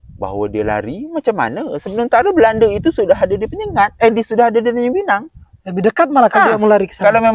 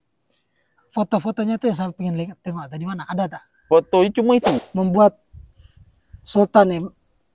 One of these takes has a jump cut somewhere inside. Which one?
second; 1 cut; at 4.7 s

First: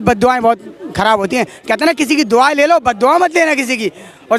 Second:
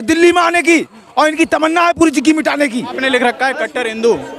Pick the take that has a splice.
second; 1 cut; at 2.9 s

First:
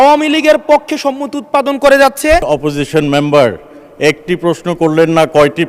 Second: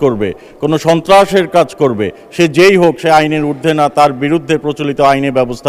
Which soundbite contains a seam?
first; 1 cut; at 2.4 s

